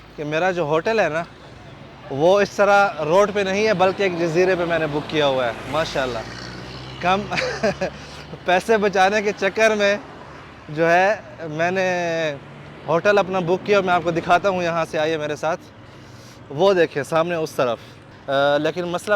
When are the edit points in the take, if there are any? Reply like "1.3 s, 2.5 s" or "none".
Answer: none